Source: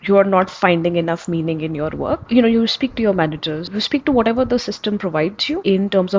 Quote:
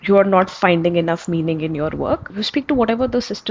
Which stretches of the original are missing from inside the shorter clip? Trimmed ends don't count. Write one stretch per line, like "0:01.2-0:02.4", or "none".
0:02.2-0:03.6